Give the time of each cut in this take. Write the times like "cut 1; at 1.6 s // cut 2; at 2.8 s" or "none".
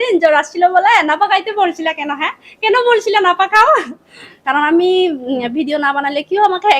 cut 1; at 4.5 s